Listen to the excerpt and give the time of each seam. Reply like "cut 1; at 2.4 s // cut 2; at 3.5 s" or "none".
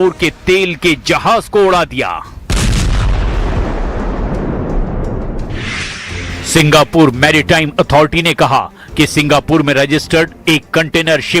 cut 1; at 9.7 s